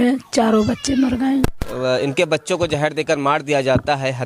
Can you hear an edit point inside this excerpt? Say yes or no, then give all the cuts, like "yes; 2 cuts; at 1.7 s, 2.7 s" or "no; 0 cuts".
yes; 1 cut; at 1.7 s